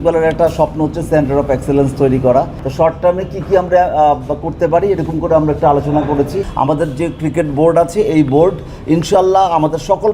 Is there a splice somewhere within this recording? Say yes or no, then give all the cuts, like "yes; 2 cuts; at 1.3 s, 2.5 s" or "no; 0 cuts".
yes; 2 cuts; at 2.6 s, 6.4 s